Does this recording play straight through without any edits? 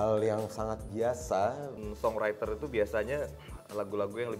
no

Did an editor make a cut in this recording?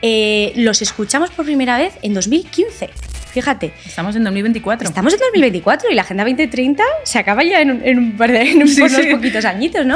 no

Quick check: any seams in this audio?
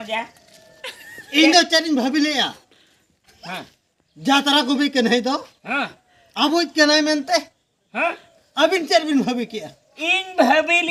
no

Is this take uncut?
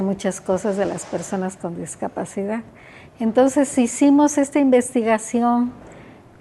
yes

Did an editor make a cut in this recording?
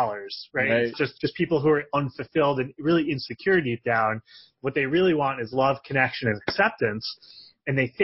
yes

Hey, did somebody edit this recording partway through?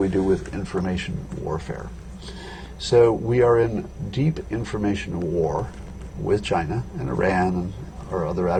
no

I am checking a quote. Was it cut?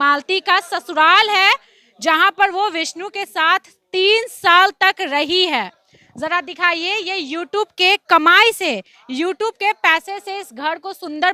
no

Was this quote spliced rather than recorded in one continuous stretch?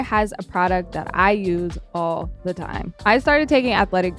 yes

